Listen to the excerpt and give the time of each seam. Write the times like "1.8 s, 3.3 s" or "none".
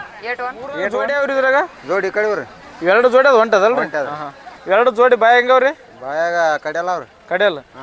0.9 s